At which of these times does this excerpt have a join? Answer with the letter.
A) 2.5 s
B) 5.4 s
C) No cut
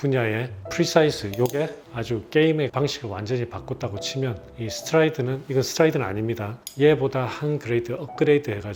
C